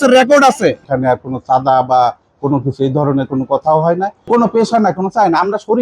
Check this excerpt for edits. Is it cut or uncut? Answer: cut